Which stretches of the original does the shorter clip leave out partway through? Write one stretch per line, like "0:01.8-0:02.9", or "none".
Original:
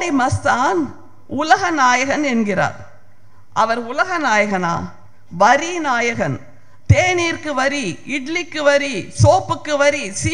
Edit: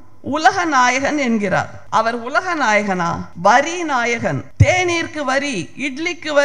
0:02.8-0:03.4
0:04.9-0:05.2
0:06.4-0:06.8